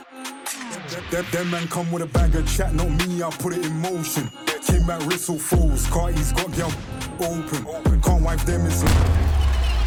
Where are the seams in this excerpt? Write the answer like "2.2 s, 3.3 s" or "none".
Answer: none